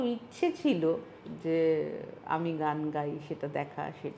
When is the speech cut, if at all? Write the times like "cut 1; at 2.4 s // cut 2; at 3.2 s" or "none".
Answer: none